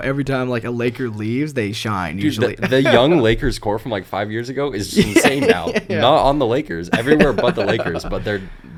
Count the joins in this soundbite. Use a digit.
0